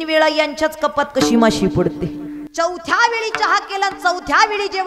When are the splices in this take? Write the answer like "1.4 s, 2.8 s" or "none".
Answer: 2.4 s

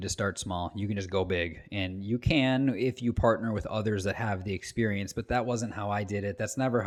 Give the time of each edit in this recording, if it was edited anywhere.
none

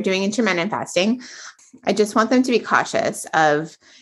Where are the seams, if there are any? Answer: 1.5 s

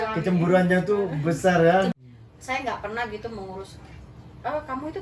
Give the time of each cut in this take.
1.9 s

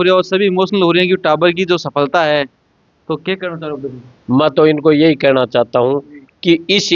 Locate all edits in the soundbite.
none

